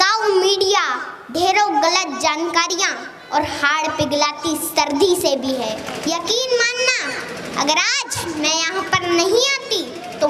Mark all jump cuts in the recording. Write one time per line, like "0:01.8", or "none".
0:05.9